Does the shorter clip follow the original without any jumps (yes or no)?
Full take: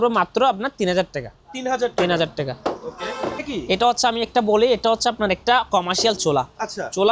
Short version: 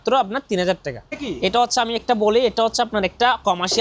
no